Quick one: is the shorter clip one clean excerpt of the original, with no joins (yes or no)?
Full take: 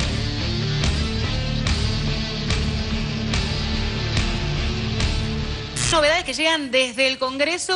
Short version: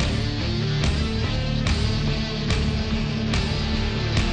yes